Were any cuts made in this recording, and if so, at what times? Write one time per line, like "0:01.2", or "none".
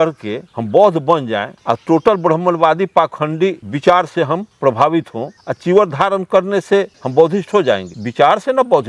none